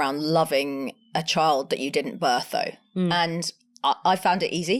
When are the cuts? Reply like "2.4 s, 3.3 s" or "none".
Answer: none